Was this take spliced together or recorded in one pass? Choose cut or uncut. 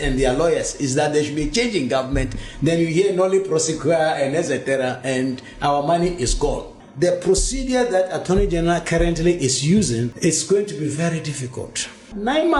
uncut